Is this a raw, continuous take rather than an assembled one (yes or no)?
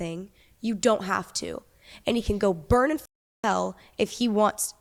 yes